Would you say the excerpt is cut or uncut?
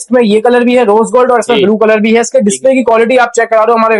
uncut